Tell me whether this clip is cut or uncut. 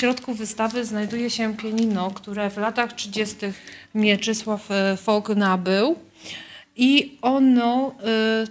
uncut